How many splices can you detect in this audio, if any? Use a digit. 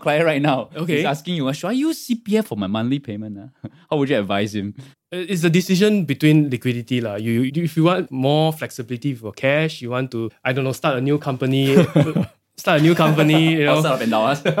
2